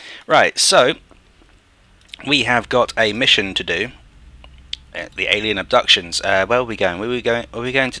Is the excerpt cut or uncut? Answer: uncut